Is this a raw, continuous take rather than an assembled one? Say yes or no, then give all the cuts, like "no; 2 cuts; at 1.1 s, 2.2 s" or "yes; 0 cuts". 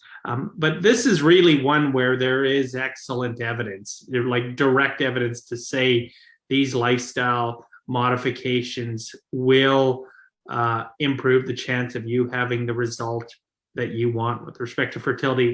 yes; 0 cuts